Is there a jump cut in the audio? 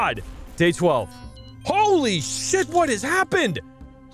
no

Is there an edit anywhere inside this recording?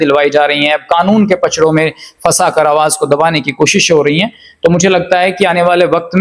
no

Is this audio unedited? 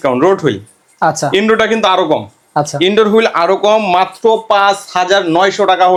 yes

